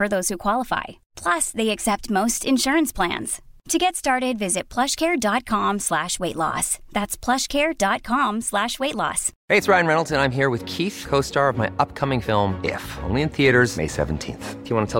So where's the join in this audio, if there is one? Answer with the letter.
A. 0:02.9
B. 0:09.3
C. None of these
B